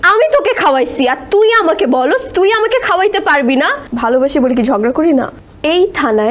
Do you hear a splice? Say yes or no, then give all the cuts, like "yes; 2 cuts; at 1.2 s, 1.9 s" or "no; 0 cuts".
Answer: yes; 2 cuts; at 3.8 s, 5.4 s